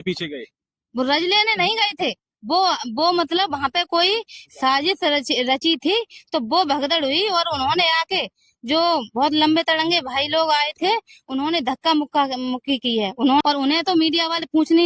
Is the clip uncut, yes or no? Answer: no